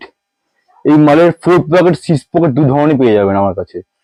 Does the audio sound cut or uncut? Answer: uncut